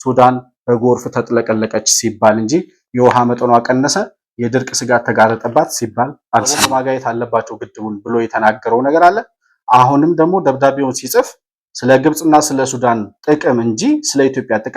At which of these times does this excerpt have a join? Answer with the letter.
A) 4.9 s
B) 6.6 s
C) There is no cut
B